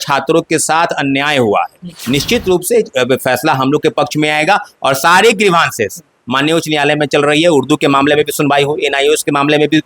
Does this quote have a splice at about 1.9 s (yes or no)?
yes